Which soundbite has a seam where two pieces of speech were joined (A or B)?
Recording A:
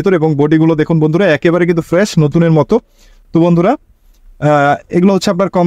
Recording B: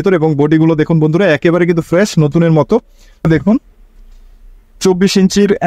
B